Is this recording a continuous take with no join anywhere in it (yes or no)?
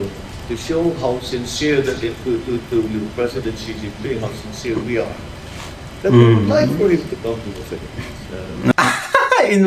no